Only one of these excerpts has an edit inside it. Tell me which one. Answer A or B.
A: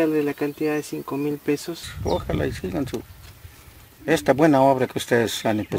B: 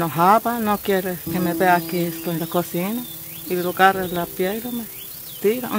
A